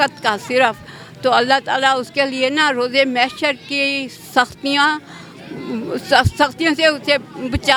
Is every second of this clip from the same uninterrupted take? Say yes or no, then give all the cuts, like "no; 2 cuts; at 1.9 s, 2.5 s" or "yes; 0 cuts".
yes; 0 cuts